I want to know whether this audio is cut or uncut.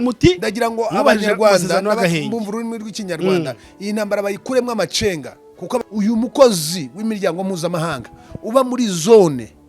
cut